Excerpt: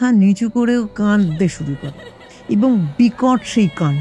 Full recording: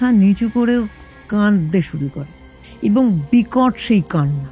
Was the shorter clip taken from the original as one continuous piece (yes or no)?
no